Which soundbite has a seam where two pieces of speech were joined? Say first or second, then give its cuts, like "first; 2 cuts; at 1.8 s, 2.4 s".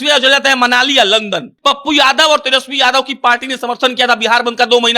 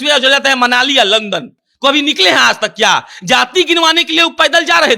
first; 1 cut; at 1.5 s